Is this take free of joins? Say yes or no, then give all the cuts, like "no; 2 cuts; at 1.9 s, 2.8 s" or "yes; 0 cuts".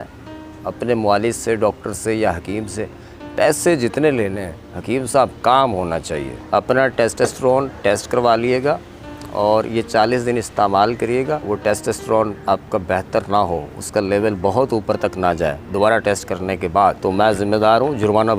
no; 3 cuts; at 6.3 s, 11.4 s, 17.0 s